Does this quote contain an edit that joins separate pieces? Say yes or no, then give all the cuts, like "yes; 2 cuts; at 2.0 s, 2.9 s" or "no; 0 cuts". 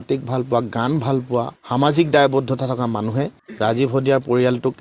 no; 0 cuts